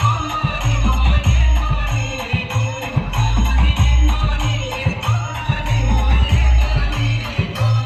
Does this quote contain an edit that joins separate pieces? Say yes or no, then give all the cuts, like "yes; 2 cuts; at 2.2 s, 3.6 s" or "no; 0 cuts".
no; 0 cuts